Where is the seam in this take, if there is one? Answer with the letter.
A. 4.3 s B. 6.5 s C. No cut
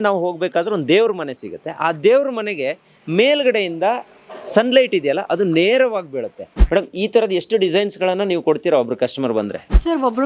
B